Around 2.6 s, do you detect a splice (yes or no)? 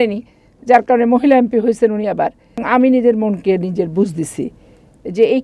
yes